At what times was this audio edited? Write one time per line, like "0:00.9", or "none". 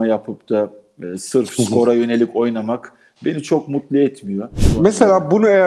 0:04.6